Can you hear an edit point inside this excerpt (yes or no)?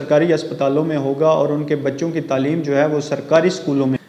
no